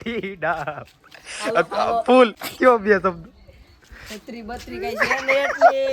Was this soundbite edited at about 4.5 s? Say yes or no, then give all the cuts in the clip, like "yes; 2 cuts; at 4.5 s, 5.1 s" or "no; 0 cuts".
no; 1 cut; at 2.4 s